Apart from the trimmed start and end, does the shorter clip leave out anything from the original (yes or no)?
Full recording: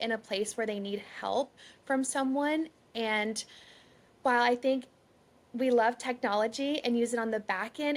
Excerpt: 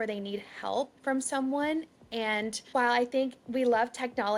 yes